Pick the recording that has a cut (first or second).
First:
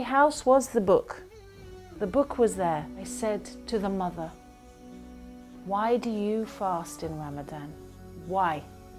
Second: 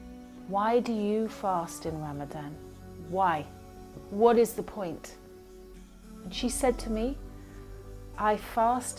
first